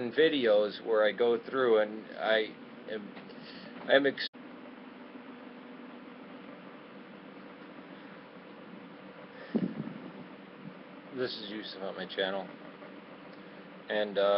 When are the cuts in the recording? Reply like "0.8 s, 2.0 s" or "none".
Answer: none

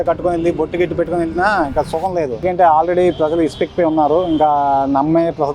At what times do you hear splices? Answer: 2.4 s

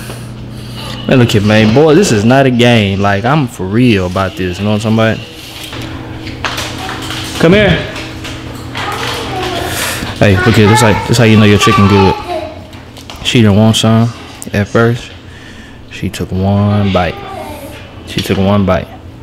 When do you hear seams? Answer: 5.7 s

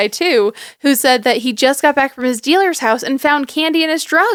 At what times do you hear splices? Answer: none

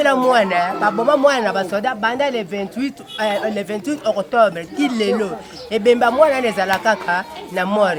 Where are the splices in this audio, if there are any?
none

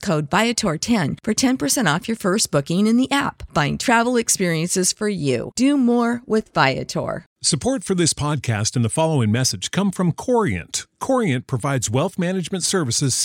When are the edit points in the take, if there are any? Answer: 7.3 s

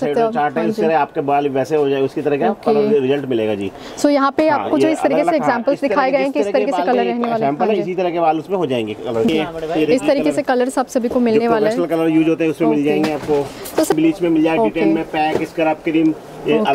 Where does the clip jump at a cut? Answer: 9.3 s, 13.9 s

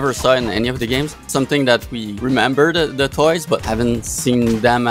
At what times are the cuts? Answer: 1.2 s, 2.0 s, 3.6 s

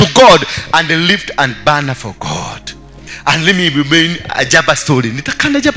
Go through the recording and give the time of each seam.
3.0 s

